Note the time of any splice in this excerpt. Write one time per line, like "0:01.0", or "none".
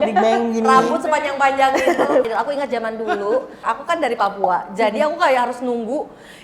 0:02.3

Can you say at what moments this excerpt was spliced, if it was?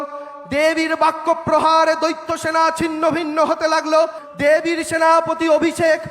0:04.2

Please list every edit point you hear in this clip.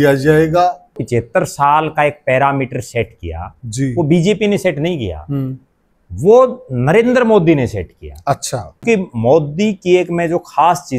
0:01.0
0:08.8

